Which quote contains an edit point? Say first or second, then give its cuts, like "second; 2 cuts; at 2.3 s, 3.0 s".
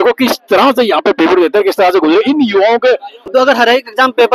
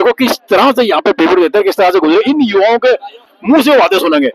first; 1 cut; at 3.2 s